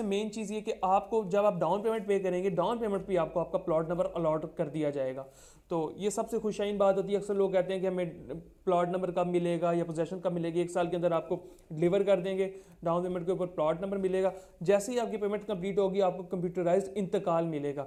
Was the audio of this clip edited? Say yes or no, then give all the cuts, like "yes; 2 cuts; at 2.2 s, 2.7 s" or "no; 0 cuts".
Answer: no; 0 cuts